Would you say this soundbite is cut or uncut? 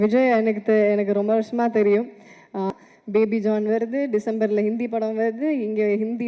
cut